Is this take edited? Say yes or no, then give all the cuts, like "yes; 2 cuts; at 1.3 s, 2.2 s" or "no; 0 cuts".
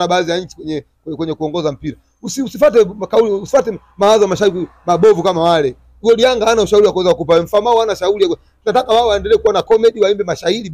no; 0 cuts